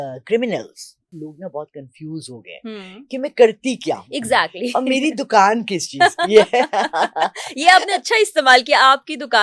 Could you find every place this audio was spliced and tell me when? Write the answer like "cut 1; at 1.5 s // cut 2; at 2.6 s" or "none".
cut 1; at 1.2 s